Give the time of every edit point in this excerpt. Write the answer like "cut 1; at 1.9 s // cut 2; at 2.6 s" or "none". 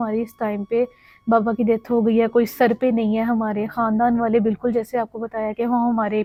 none